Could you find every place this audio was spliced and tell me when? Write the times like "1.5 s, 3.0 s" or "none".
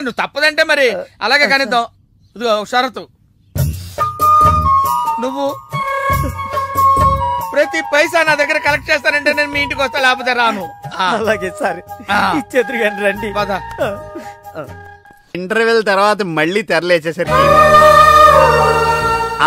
15.3 s